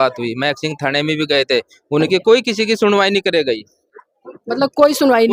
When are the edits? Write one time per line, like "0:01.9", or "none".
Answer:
none